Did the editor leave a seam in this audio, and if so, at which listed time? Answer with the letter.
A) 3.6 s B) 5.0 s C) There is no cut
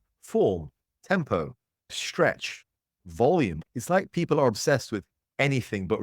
A